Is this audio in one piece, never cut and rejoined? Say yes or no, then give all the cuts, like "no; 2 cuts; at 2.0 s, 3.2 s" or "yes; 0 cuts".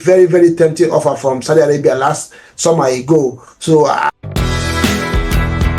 no; 1 cut; at 4.2 s